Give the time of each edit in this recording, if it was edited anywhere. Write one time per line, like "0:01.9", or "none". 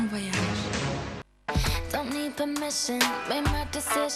0:01.4